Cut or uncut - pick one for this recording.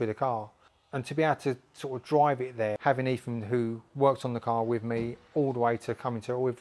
cut